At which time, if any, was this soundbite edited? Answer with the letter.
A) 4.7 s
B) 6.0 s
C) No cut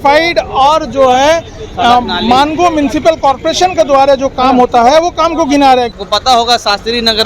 B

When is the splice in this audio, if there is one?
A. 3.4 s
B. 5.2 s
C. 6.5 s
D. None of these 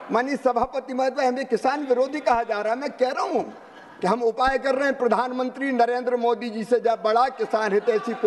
D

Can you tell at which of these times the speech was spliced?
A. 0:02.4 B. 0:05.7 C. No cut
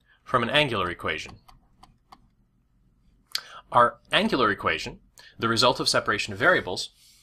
A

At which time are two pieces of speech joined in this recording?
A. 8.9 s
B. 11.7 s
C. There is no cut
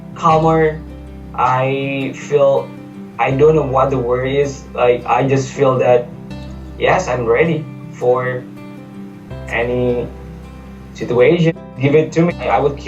B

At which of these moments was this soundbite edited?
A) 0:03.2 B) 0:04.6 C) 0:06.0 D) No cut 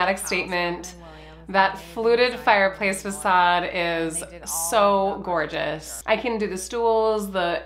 C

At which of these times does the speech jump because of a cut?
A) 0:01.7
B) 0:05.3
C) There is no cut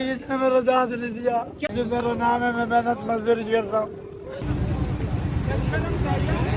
A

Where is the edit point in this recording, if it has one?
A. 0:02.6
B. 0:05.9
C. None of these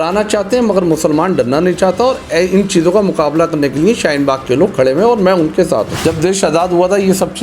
B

